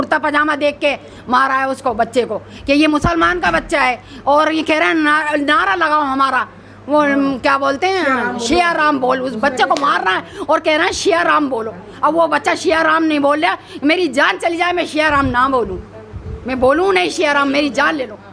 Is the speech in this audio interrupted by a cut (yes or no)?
no